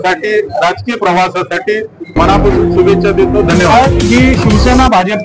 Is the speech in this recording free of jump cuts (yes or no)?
no